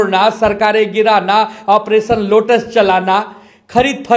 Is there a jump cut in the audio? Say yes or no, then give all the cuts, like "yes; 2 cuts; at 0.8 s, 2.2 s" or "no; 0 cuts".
no; 0 cuts